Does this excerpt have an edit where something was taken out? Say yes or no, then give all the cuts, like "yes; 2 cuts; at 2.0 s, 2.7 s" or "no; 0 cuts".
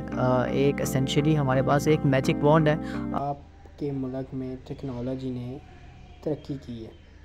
yes; 1 cut; at 3.2 s